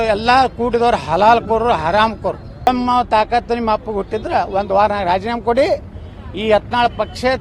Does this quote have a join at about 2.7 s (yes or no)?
yes